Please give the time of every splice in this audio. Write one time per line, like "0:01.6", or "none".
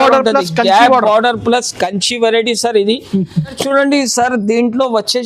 0:03.6